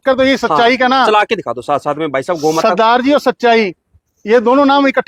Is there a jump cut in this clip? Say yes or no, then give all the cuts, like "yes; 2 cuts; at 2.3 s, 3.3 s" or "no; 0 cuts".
no; 0 cuts